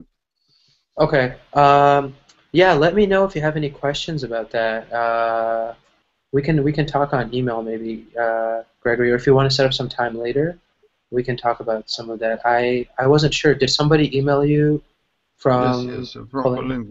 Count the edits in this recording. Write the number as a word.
one